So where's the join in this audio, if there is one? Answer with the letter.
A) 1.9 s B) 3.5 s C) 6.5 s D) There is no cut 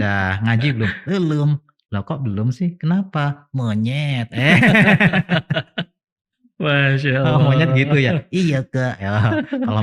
D